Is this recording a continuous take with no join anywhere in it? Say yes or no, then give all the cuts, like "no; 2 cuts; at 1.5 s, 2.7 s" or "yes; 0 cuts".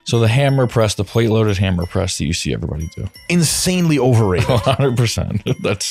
yes; 0 cuts